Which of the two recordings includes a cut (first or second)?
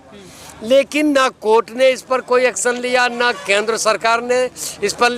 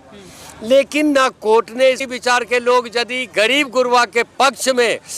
second